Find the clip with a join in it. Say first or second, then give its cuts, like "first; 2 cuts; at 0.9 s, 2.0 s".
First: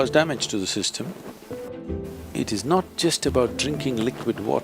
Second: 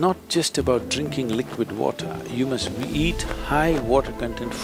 first; 1 cut; at 1.7 s